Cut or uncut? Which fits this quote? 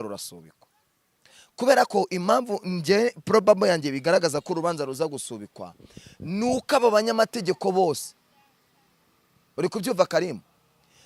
uncut